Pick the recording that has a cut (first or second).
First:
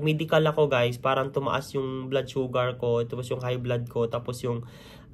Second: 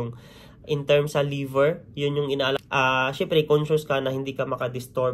second